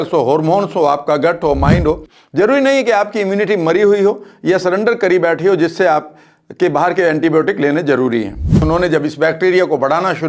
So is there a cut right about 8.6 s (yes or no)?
yes